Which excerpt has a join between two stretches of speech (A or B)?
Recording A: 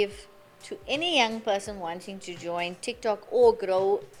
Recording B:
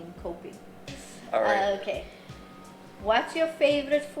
B